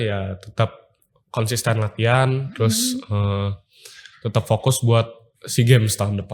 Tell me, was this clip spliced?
no; 0 cuts

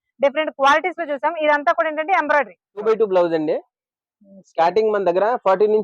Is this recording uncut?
no; 1 cut; at 2.8 s

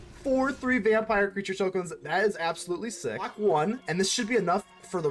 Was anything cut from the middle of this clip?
yes; 1 cut; at 3.3 s

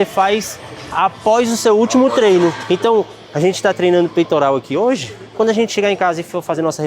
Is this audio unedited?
no; 1 cut; at 2.6 s

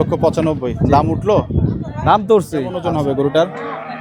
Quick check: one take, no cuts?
no; 1 cut; at 2.8 s

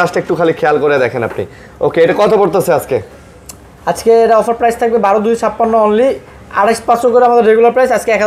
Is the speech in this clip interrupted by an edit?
no; 0 cuts

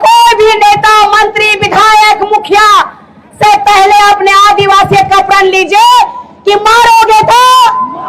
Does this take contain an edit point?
no; 0 cuts

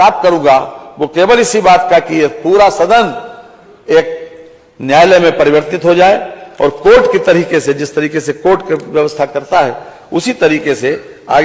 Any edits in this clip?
no; 0 cuts

